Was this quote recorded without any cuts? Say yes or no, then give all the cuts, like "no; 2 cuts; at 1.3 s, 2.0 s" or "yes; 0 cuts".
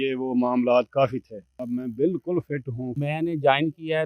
no; 2 cuts; at 1.5 s, 3.0 s